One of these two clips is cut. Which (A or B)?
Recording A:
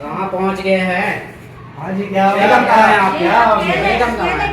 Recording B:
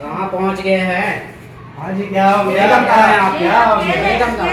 A